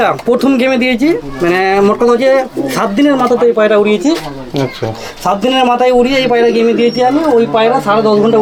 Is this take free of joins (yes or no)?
yes